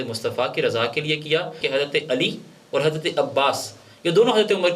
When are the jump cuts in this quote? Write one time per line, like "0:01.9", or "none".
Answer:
0:01.6